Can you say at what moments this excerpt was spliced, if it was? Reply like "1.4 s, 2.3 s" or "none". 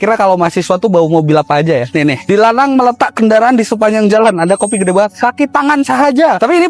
none